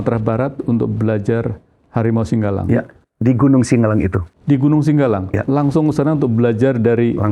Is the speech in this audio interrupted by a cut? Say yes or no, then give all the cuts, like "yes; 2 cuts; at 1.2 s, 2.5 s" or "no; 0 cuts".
no; 0 cuts